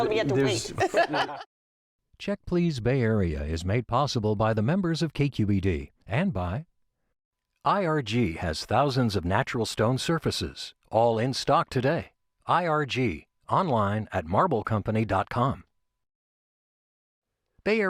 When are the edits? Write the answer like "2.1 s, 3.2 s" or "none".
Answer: 1.3 s